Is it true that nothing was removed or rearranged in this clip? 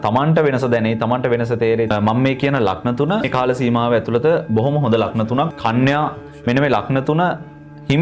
no; 3 cuts; at 1.9 s, 3.3 s, 6.2 s

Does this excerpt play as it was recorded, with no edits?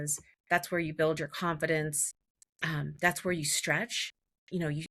yes; 0 cuts

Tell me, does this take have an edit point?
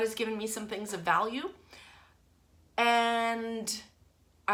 no; 0 cuts

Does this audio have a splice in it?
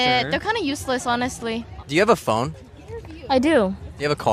yes; 1 cut; at 1.7 s

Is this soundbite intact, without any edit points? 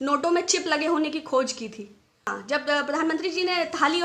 no; 1 cut; at 2.3 s

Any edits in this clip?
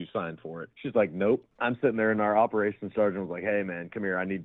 yes; 1 cut; at 1.5 s

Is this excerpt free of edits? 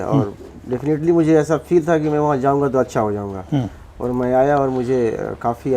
yes; 0 cuts

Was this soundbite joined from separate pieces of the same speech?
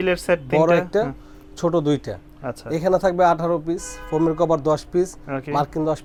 no; 0 cuts

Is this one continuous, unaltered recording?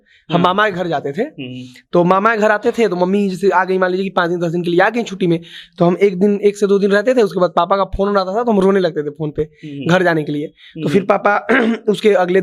yes; 0 cuts

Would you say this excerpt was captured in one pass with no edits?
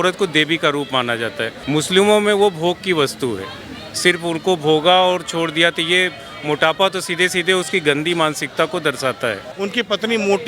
no; 2 cuts; at 1.5 s, 9.5 s

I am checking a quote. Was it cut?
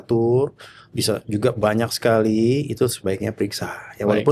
no; 0 cuts

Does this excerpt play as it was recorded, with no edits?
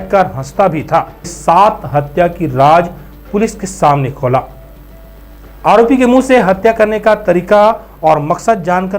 no; 1 cut; at 1.3 s

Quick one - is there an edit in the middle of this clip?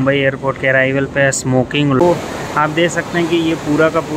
yes; 1 cut; at 2.0 s

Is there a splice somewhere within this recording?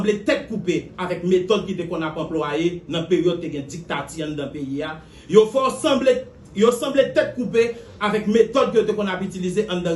no; 0 cuts

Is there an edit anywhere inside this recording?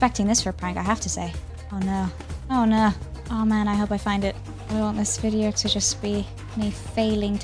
no; 0 cuts

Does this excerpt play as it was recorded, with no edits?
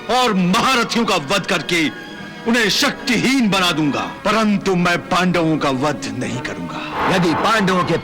no; 2 cuts; at 4.1 s, 7.0 s

